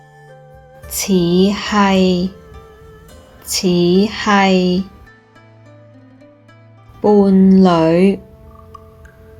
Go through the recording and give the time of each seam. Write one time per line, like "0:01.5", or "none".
none